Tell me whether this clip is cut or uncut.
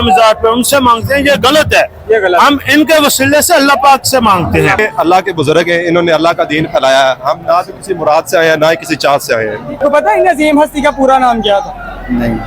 cut